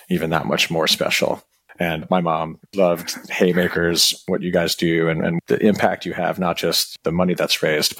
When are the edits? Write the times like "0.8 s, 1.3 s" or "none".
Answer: 2.1 s, 4.2 s, 5.4 s, 6.9 s